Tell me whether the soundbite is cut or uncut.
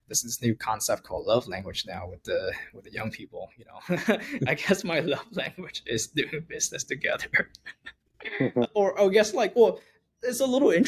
uncut